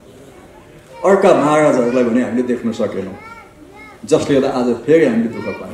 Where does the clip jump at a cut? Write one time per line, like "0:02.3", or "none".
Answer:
none